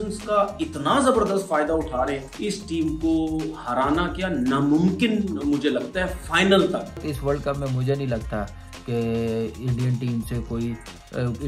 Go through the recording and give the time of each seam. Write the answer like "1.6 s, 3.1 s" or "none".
2.2 s, 7.1 s